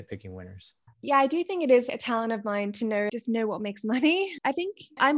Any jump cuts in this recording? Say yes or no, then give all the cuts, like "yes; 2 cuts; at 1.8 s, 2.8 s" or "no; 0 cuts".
yes; 4 cuts; at 0.9 s, 1.9 s, 3.1 s, 4.4 s